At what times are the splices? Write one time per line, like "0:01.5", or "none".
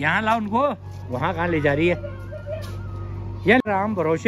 none